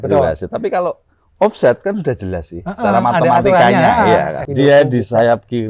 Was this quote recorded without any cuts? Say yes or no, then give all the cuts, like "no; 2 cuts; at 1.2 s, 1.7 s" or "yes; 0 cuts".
no; 1 cut; at 4.4 s